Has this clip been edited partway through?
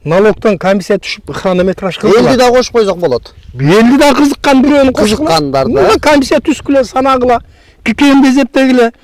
no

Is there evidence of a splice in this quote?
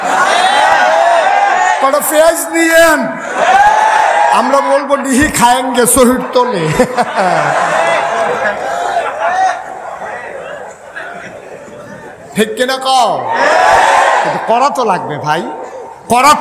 no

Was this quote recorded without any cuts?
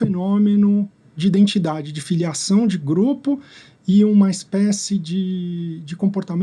yes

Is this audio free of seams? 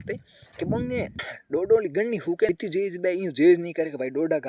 no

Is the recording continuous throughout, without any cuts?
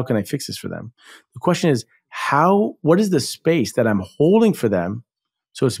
yes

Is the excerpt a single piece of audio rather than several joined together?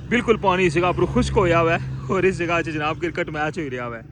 yes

